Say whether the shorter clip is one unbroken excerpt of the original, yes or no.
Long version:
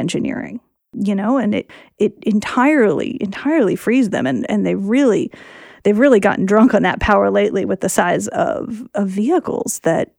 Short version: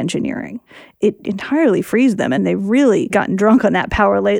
no